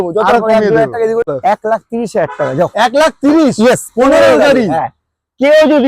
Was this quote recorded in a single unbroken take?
no; 1 cut; at 1.3 s

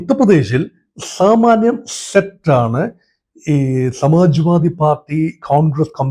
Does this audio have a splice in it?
no; 0 cuts

